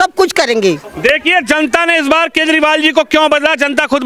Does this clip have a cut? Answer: no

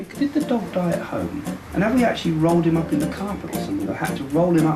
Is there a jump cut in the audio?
yes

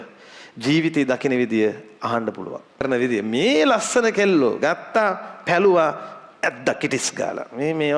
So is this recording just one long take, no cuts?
no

